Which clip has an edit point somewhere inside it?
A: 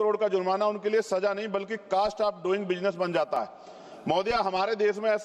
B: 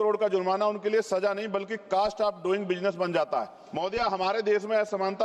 B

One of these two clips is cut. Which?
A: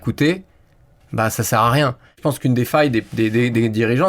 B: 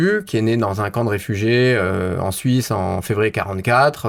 A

